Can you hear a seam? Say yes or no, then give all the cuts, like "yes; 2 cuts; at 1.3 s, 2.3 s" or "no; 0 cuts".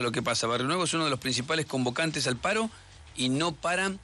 no; 0 cuts